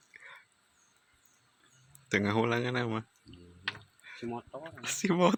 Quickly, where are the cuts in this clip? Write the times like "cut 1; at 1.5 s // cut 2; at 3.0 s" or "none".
none